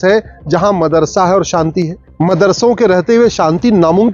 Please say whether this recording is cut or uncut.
cut